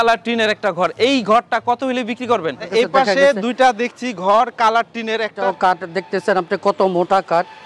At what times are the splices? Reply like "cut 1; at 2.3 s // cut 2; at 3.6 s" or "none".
cut 1; at 2.6 s // cut 2; at 5.4 s